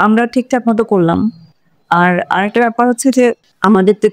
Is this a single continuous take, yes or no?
yes